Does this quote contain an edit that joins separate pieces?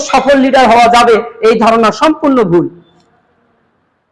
no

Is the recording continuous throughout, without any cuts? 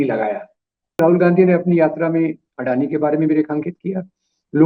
no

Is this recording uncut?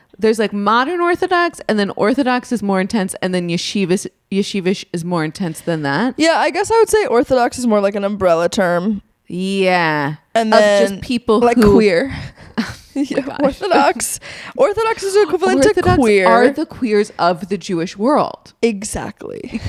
yes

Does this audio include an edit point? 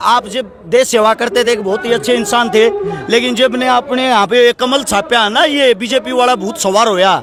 no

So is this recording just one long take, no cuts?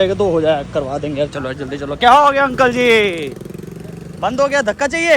yes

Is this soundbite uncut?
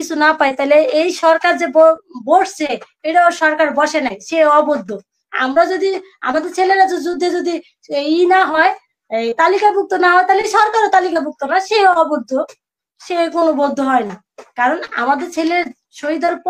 yes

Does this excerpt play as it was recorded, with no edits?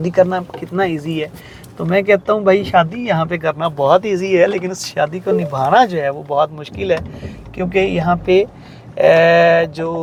yes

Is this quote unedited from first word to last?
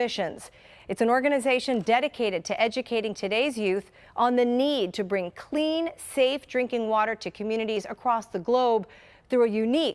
no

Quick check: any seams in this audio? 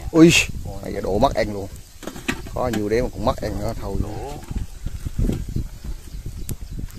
no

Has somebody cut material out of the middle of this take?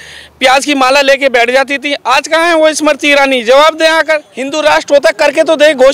yes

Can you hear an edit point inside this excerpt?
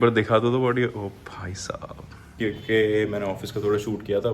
yes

